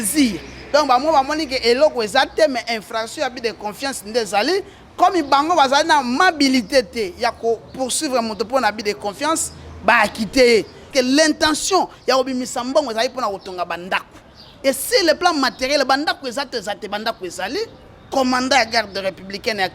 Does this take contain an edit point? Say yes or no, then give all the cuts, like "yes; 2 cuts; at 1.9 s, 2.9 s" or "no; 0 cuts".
yes; 1 cut; at 10.8 s